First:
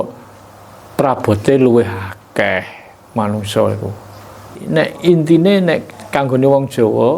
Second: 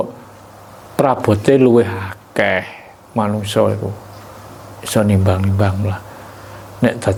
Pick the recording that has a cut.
first; 1 cut; at 4.6 s

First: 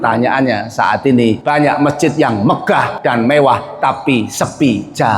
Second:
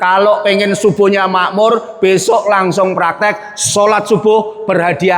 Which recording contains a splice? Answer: first; 2 cuts; at 1.4 s, 2.9 s

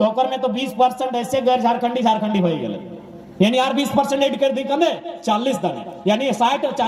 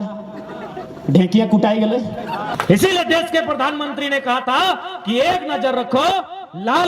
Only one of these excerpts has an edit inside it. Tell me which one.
second; 1 cut; at 2.5 s

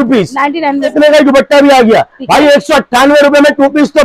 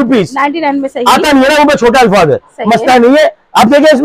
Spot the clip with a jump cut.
first; 1 cut; at 0.9 s

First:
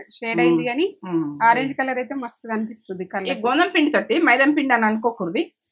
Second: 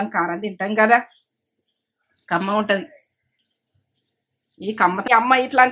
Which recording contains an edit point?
second; 1 cut; at 4.7 s

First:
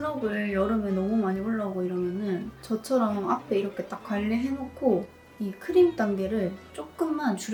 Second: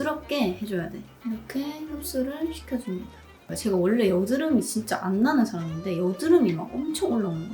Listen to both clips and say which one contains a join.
second; 2 cuts; at 1.1 s, 3.5 s

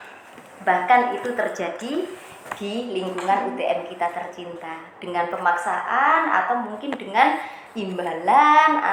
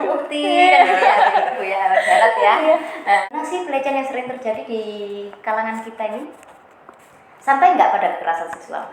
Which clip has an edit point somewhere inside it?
second; 1 cut; at 3.3 s

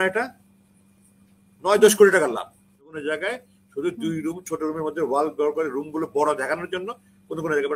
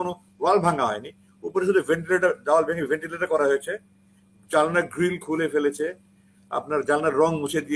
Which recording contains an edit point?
first; 1 cut; at 2.8 s

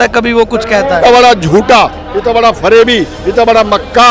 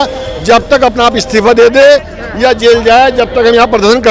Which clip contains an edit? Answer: first; 1 cut; at 1.1 s

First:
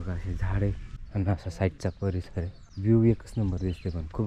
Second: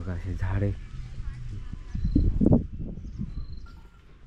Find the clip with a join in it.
first; 2 cuts; at 0.9 s, 2.6 s

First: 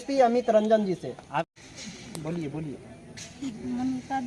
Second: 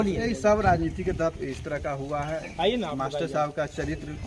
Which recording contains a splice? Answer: first; 1 cut; at 1.6 s

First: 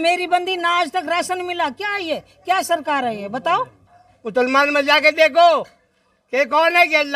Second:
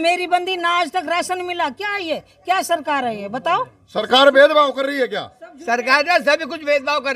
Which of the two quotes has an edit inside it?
first; 1 cut; at 3.8 s

